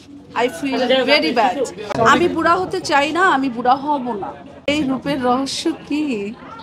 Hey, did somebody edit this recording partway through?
yes; 2 cuts; at 1.8 s, 4.7 s

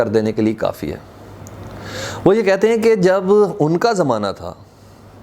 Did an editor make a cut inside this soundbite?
no; 0 cuts

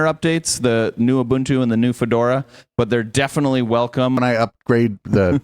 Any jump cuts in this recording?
yes; 1 cut; at 4.2 s

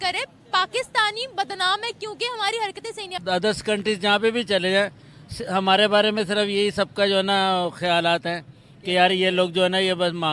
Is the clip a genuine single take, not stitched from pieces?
no; 1 cut; at 3.1 s

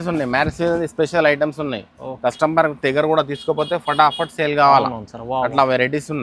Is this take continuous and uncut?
yes; 0 cuts

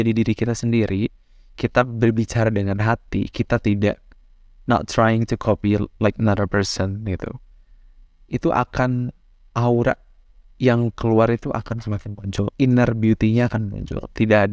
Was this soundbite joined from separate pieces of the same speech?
no; 0 cuts

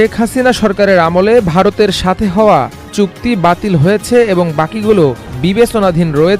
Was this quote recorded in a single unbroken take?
no; 1 cut; at 2.9 s

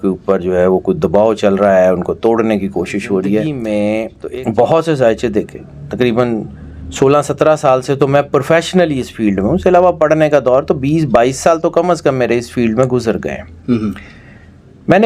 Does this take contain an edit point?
yes; 1 cut; at 3.6 s

